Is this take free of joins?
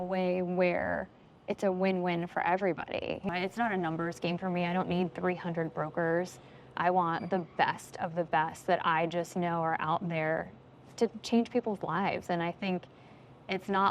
no; 1 cut; at 3.3 s

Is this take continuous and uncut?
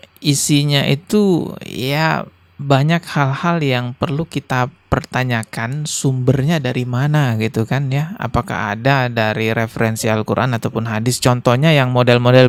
yes; 0 cuts

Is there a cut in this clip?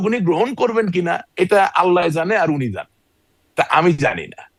no; 0 cuts

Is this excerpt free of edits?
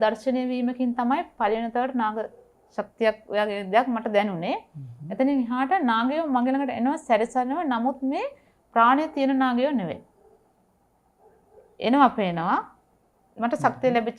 yes; 0 cuts

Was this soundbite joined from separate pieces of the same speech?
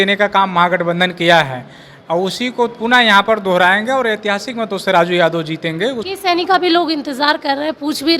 yes; 1 cut; at 6.0 s

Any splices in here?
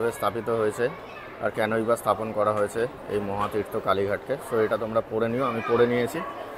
no; 0 cuts

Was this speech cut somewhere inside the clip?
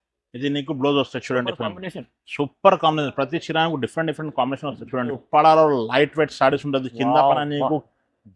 yes; 1 cut; at 5.2 s

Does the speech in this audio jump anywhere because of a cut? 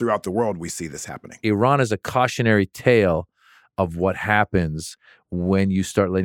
yes; 1 cut; at 1.4 s

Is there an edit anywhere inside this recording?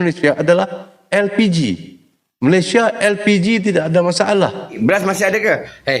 yes; 1 cut; at 4.8 s

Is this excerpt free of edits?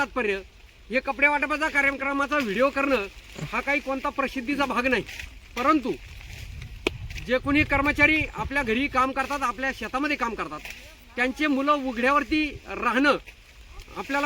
yes; 0 cuts

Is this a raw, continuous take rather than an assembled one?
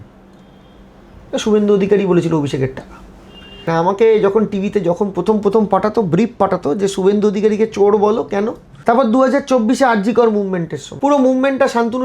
no; 3 cuts; at 3.6 s, 8.7 s, 10.8 s

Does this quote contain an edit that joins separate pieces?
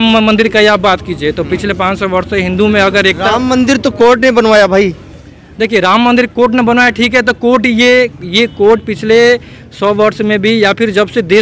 no; 0 cuts

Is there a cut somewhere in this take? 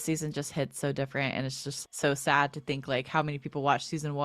no; 0 cuts

